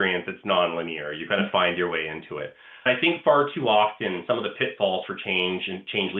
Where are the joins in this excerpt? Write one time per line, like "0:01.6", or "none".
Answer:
0:02.9